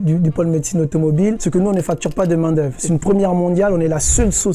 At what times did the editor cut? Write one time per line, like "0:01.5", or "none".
0:01.4
0:02.8

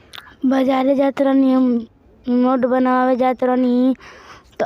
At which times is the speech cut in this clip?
0:01.8

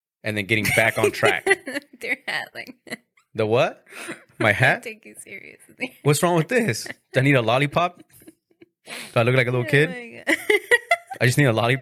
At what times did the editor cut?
none

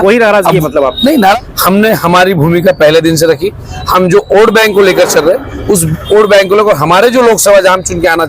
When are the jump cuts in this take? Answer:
0:01.3

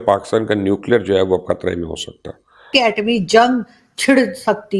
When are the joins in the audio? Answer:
0:02.7

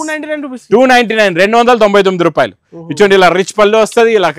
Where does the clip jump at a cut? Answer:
none

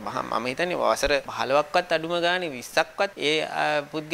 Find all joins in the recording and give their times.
0:01.3
0:03.2

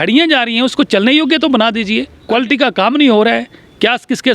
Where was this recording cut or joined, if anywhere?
0:02.1

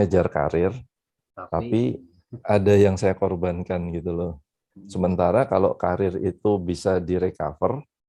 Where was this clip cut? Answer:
none

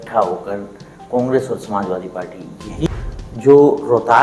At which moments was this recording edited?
0:02.9

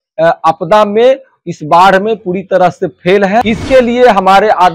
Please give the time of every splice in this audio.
0:03.4

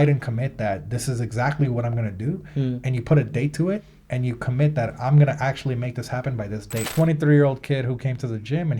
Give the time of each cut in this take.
0:06.9

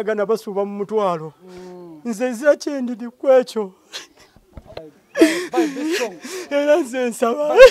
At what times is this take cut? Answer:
0:04.8

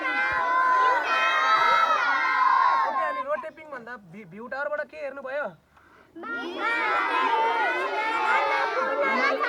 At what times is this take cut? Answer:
none

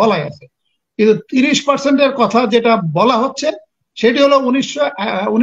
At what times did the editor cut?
none

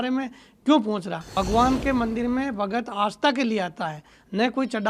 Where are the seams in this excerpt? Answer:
0:01.2

